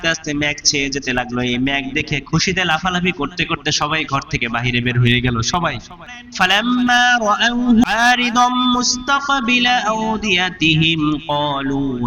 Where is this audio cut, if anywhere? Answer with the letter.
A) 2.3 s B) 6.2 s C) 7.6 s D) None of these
B